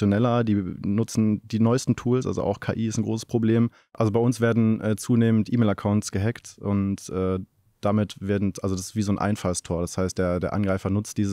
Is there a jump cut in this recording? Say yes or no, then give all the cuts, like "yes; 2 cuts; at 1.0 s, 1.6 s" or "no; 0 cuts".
yes; 1 cut; at 3.9 s